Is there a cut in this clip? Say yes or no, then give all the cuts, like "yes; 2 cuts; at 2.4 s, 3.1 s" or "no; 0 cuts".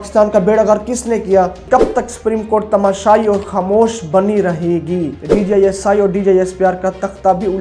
yes; 2 cuts; at 1.6 s, 5.2 s